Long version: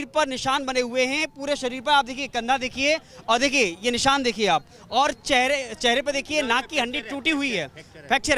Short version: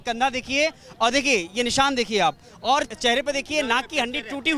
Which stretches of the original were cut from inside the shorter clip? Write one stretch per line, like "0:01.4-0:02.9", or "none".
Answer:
0:05.2-0:05.7